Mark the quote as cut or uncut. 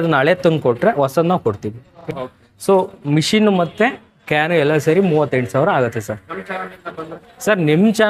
cut